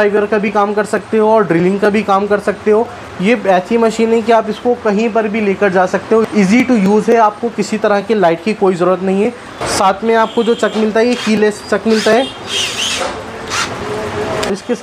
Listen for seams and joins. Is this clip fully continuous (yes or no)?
yes